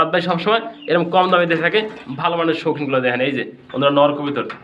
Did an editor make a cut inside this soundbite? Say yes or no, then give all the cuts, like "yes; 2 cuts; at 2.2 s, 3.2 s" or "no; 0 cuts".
no; 0 cuts